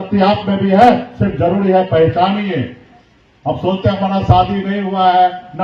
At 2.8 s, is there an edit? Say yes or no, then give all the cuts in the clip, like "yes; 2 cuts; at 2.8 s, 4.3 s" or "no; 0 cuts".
no; 0 cuts